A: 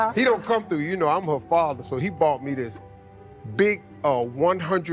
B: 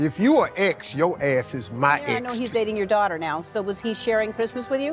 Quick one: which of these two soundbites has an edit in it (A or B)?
B